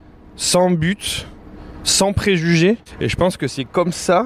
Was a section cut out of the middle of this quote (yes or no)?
yes